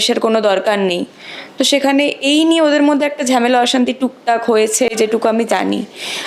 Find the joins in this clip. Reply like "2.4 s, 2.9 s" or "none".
none